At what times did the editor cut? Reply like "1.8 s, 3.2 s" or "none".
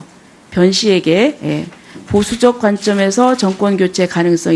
2.5 s

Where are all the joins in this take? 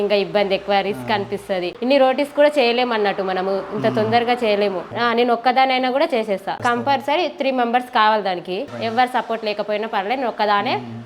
4.9 s, 8.7 s

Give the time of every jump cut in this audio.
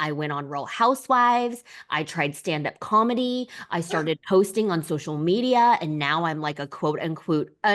none

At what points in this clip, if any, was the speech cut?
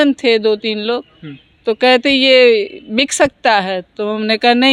none

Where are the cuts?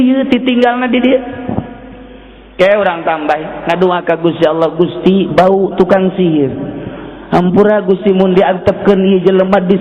none

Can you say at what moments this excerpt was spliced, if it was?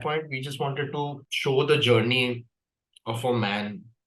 1.3 s

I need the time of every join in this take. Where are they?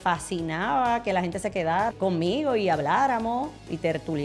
1.9 s

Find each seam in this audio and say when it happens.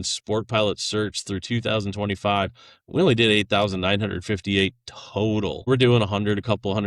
5.7 s

